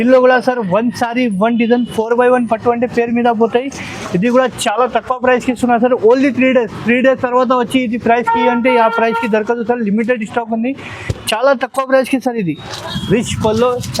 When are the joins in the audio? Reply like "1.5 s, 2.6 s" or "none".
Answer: 12.8 s